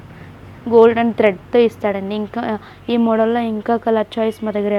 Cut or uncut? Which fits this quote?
uncut